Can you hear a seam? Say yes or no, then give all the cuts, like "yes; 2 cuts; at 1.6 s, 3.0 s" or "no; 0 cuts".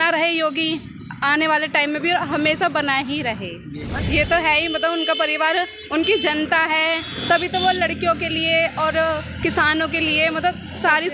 yes; 1 cut; at 3.9 s